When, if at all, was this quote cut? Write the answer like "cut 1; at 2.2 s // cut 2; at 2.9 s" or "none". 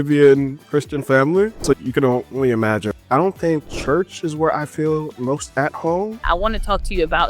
cut 1; at 1.8 s // cut 2; at 3.0 s // cut 3; at 3.7 s // cut 4; at 6.2 s